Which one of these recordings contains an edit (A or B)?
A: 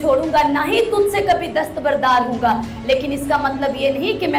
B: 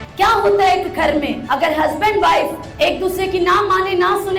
B